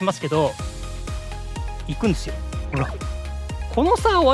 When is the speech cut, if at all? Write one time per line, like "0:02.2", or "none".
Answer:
none

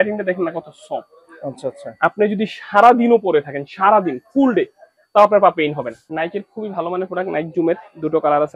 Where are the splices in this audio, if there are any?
0:06.0

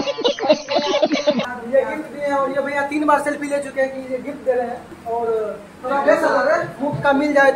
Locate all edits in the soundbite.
0:01.5
0:04.9

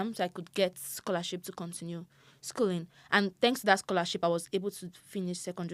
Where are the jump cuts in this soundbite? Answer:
none

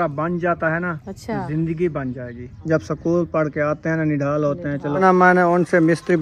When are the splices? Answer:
0:01.1
0:02.5
0:05.0

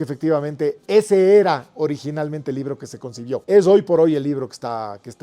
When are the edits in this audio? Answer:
0:03.4

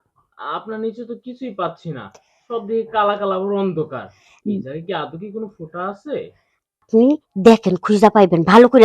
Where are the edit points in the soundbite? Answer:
0:06.8

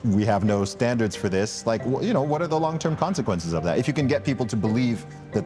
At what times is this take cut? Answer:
none

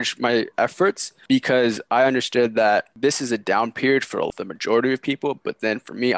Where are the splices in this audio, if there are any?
0:01.1
0:02.9

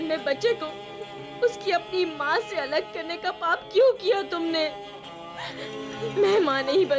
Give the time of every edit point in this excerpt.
0:05.8

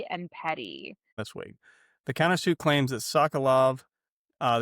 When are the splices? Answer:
0:01.2

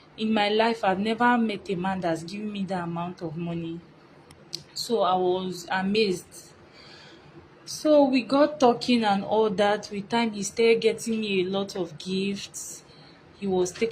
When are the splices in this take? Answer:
none

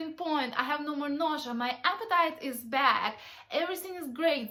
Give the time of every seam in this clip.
none

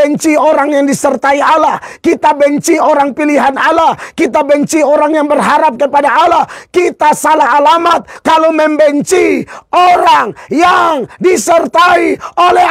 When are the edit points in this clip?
0:08.1

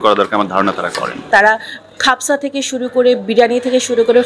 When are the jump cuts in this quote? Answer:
0:01.3

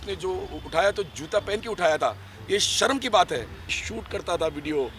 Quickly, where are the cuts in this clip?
0:03.8

